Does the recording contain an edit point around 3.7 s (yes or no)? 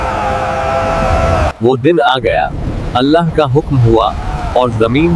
no